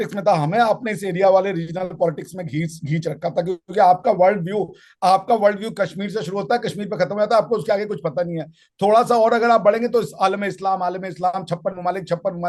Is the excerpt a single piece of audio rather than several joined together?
yes; 0 cuts

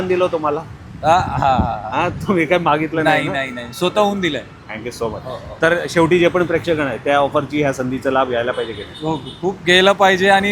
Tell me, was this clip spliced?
no; 0 cuts

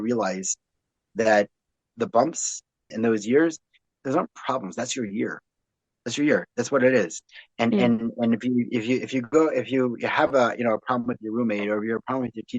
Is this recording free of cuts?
no; 3 cuts; at 1.9 s, 2.9 s, 3.8 s

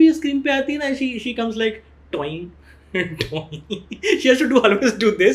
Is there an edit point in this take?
no; 0 cuts

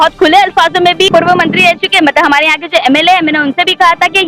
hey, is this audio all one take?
no; 1 cut; at 1.1 s

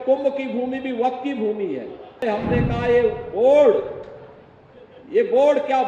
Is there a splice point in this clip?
yes; 1 cut; at 2.2 s

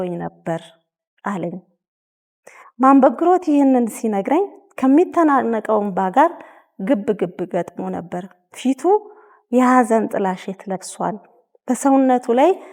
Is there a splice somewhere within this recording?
no; 0 cuts

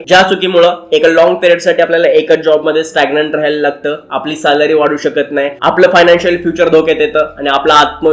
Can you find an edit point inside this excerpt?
no; 0 cuts

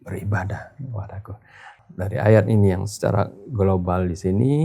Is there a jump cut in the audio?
yes; 1 cut; at 1.7 s

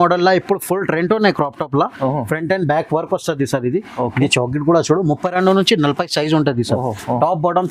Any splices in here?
no; 0 cuts

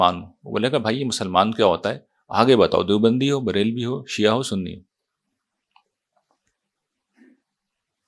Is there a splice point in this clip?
no; 0 cuts

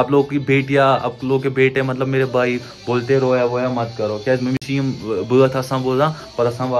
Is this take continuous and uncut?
yes; 0 cuts

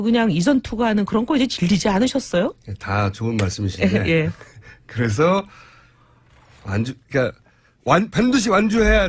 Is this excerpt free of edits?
yes; 0 cuts

